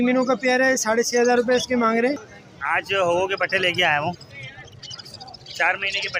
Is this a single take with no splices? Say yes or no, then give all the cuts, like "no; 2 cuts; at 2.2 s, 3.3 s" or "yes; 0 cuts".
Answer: no; 1 cut; at 2.2 s